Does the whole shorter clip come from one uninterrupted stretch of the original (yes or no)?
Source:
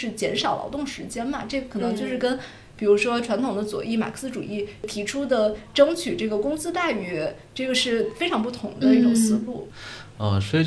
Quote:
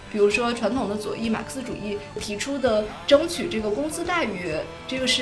yes